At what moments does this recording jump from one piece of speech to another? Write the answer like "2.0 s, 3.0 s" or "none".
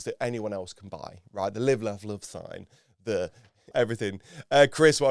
3.7 s